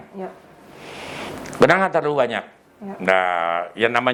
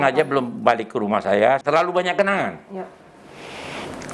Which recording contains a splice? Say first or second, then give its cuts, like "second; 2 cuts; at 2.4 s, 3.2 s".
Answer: second; 1 cut; at 1.6 s